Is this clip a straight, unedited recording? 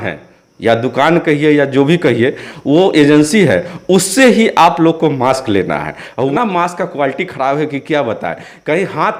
no; 1 cut; at 6.3 s

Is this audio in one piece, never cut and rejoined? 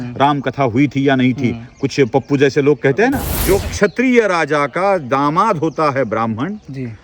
no; 1 cut; at 3.3 s

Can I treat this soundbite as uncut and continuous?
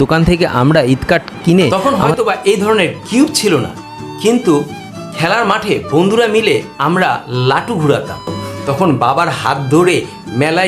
no; 2 cuts; at 1.7 s, 8.5 s

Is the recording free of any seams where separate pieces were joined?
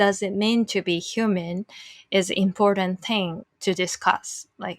no; 1 cut; at 3.4 s

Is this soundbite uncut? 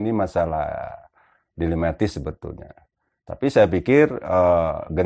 yes; 0 cuts

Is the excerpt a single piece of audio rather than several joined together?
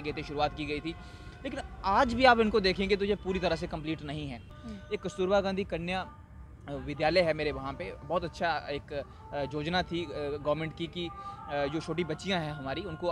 no; 1 cut; at 4.6 s

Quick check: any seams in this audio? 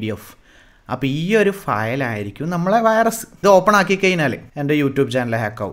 yes; 2 cuts; at 3.3 s, 4.5 s

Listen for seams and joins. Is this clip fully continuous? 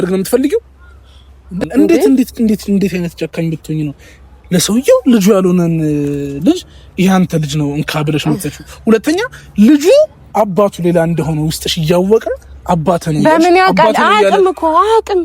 no; 1 cut; at 1.6 s

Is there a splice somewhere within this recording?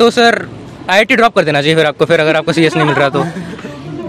no; 0 cuts

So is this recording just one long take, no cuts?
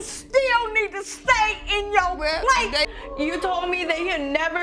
no; 1 cut; at 2.9 s

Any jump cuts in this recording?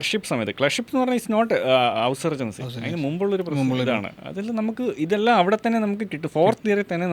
no; 0 cuts

